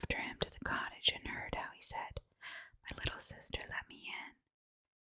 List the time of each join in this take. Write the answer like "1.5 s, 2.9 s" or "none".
none